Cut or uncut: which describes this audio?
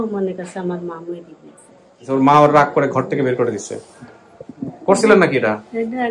cut